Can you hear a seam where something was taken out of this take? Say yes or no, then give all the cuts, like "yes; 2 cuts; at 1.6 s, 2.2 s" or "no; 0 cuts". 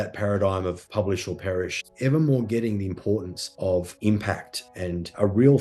yes; 1 cut; at 1.8 s